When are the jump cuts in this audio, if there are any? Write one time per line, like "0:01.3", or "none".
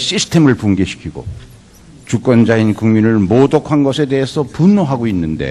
0:04.2